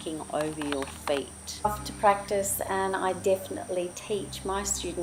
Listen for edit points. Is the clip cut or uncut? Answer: uncut